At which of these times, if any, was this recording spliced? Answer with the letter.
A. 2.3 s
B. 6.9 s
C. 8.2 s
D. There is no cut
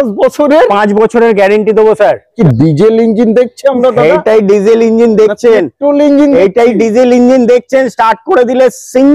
A